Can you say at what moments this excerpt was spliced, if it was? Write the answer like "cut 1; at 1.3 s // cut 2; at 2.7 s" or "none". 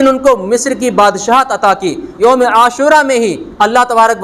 cut 1; at 2.1 s